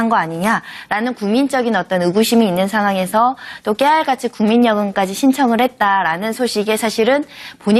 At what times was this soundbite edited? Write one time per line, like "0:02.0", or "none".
none